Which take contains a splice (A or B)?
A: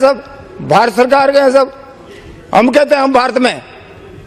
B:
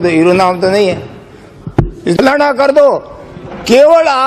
B